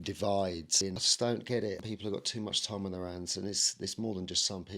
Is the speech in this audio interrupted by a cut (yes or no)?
yes